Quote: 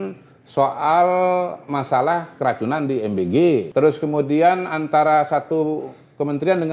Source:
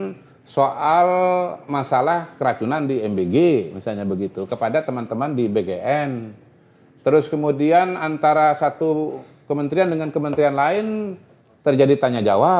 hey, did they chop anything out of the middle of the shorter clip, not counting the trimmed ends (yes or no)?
yes